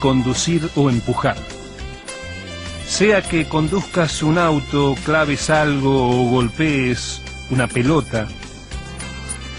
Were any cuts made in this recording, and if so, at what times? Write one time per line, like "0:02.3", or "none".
0:07.0